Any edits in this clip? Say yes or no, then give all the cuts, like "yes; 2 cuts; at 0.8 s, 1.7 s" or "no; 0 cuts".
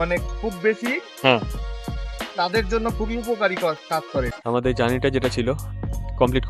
yes; 1 cut; at 4.3 s